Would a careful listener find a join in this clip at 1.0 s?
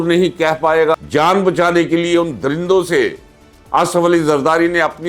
yes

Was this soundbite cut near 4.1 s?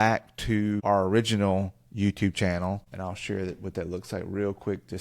no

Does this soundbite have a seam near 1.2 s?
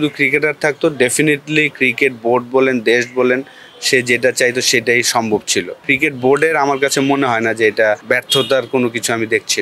no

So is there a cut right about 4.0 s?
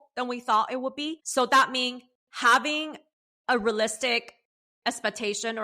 no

